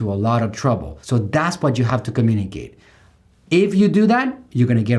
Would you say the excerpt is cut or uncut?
cut